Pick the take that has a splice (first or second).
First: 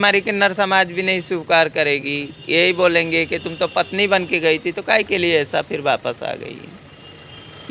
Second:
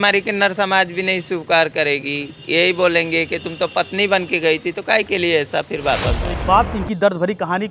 second